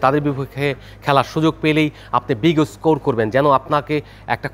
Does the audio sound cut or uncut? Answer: uncut